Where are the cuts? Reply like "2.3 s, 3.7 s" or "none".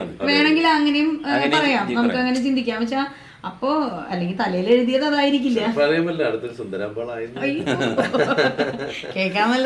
none